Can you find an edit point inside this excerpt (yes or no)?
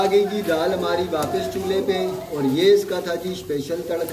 no